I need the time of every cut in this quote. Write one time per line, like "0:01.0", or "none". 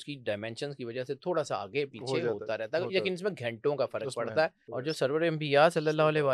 0:04.6